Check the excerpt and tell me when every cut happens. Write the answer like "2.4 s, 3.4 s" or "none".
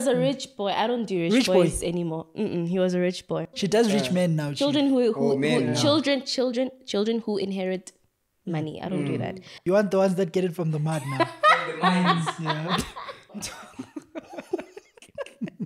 3.6 s, 9.5 s, 13.6 s